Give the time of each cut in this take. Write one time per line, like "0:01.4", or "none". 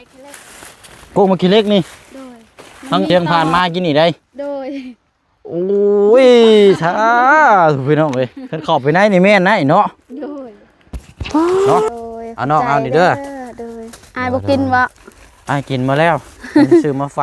0:03.1
0:11.9